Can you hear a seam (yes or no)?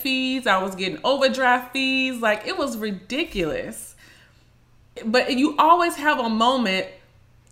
yes